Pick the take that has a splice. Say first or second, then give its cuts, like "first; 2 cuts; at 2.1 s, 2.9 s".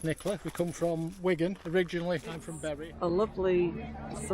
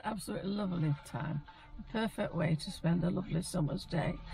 first; 1 cut; at 2.5 s